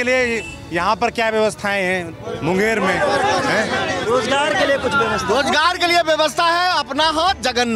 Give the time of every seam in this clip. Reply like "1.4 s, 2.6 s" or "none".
none